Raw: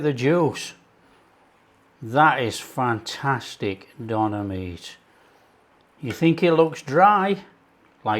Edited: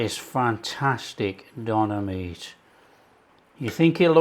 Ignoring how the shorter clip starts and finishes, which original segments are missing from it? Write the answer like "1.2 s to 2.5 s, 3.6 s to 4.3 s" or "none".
none